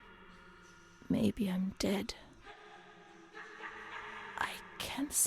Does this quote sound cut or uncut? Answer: uncut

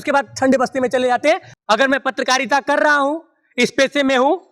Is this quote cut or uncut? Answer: cut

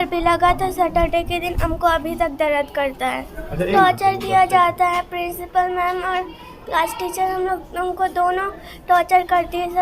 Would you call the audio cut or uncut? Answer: cut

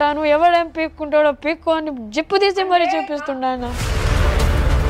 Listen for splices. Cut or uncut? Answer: cut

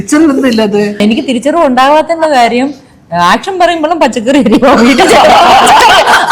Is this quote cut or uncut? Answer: cut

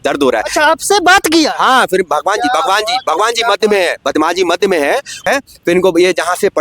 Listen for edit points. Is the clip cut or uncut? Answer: cut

